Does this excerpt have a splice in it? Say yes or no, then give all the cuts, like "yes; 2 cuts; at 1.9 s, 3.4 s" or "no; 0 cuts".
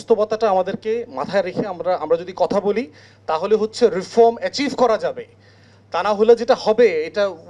no; 0 cuts